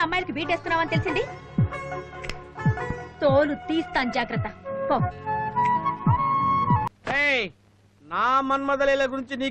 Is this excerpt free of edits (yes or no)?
no